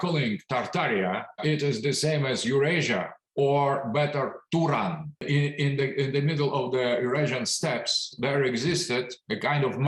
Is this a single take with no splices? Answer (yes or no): no